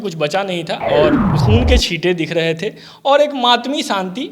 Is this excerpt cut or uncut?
cut